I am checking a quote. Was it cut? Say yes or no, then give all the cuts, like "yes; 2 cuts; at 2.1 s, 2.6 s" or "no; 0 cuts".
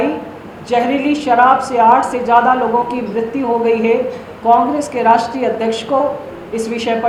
no; 0 cuts